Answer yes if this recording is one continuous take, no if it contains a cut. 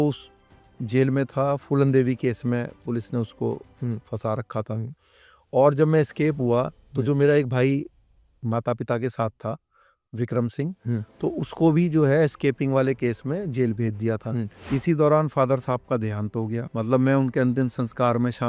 no